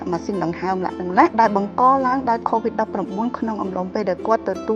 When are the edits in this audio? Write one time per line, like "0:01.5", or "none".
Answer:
0:01.3